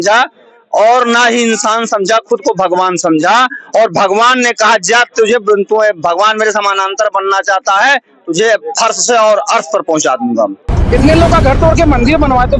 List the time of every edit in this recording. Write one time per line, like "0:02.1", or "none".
0:10.7